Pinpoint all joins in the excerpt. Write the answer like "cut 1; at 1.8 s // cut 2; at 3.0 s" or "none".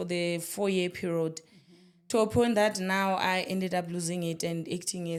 none